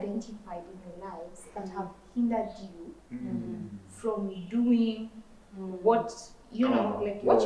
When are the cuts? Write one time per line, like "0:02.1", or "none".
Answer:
none